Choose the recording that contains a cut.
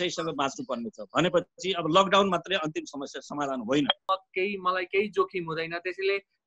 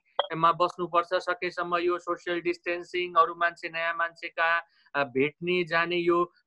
first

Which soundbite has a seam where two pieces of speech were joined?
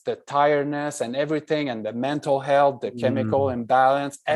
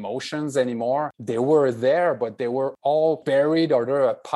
second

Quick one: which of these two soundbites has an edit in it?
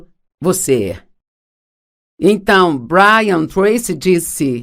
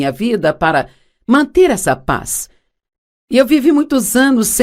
first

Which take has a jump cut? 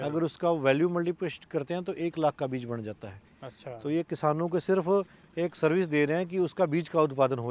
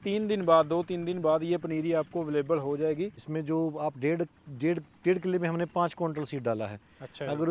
second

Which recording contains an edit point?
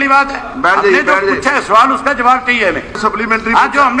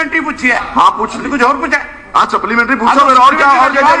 first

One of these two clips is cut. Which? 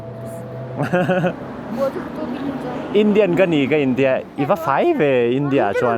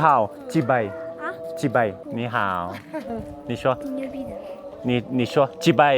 second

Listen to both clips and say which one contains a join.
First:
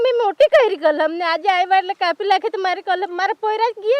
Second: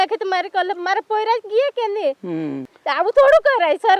second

